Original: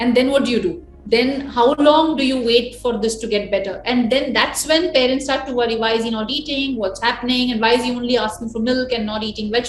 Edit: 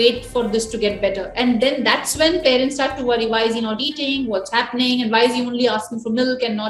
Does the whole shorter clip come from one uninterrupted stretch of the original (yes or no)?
yes